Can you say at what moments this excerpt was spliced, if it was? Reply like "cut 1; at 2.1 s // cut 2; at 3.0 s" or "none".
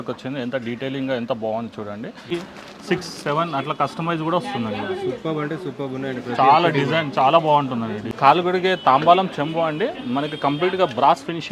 cut 1; at 2.3 s // cut 2; at 8.0 s